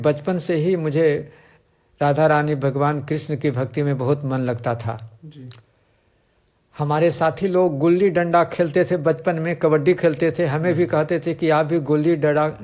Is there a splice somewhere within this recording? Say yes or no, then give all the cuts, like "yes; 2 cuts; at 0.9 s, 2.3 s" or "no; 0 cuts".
no; 0 cuts